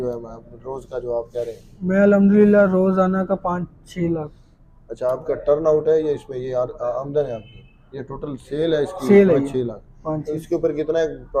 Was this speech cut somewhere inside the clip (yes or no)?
no